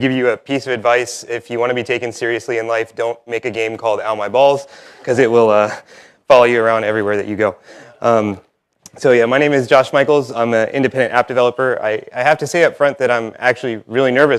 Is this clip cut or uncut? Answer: cut